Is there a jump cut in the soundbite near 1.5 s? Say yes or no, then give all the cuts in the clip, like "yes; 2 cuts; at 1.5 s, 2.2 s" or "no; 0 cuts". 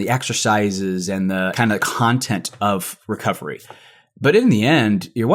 yes; 1 cut; at 1.5 s